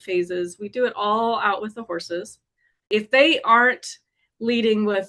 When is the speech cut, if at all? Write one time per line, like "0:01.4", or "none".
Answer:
0:02.9